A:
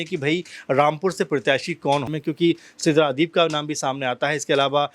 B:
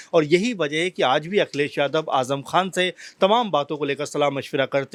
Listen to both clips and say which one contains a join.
A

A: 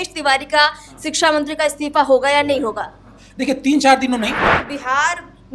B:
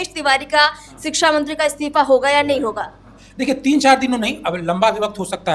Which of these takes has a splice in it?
A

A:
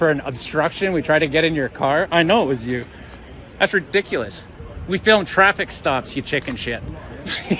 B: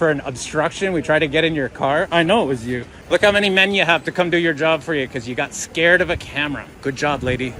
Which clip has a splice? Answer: B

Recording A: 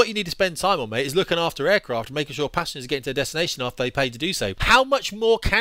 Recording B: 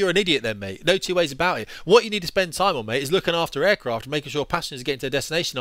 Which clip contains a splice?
A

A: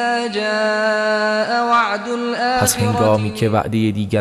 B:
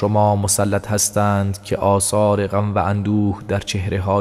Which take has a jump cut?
A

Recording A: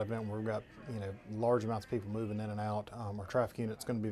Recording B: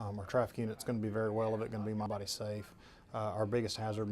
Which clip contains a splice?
B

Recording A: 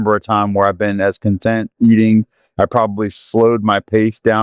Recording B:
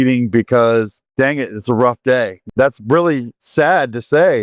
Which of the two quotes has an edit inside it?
B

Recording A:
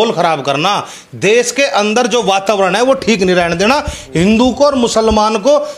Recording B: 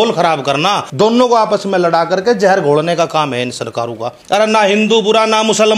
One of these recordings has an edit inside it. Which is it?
B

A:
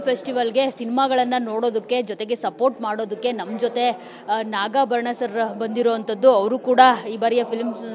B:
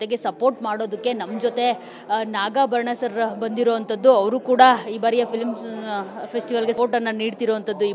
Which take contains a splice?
B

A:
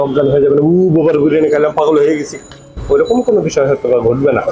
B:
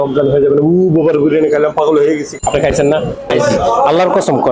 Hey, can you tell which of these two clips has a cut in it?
B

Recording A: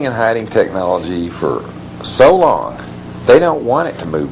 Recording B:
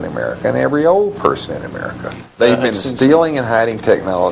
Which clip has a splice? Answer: B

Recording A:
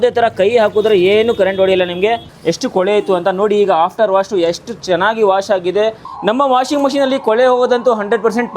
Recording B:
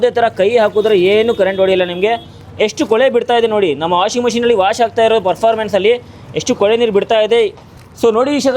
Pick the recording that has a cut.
A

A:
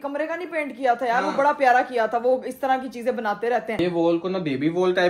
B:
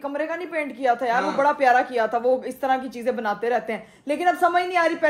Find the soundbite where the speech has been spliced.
A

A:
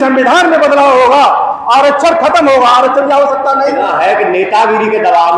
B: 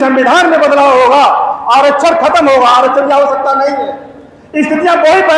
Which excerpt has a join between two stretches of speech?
A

